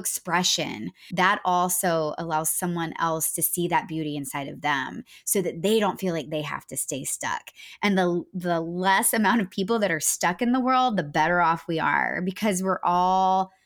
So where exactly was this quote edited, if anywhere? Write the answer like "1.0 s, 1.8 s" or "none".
1.0 s